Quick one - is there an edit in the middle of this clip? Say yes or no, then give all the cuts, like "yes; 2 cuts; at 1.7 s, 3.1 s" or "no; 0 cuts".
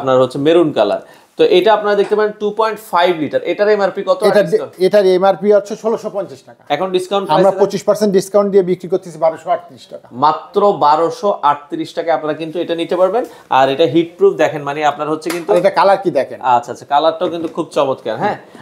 no; 0 cuts